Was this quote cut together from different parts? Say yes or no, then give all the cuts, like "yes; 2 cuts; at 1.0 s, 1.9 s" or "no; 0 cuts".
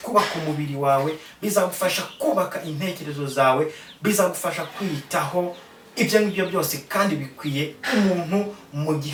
no; 0 cuts